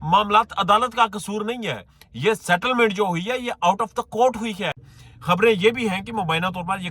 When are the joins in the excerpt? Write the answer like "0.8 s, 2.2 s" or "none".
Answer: 4.9 s

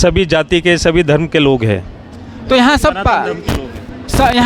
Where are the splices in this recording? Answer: none

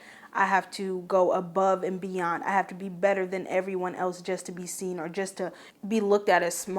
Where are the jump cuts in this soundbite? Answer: 5.7 s

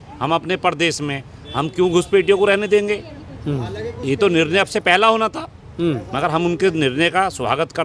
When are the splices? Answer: none

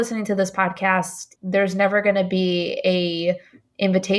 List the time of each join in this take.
1.2 s

